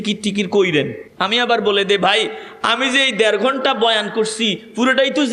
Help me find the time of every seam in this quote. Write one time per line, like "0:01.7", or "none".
0:01.1